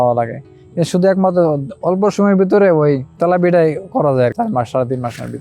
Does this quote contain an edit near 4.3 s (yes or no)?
yes